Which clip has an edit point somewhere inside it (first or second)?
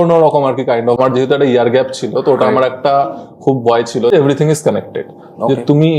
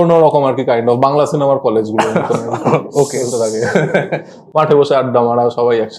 first